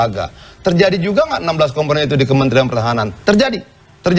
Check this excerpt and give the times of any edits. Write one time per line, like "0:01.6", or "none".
none